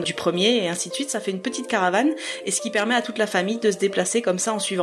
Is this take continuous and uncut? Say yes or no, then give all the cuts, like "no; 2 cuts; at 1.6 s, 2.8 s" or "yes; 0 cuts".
yes; 0 cuts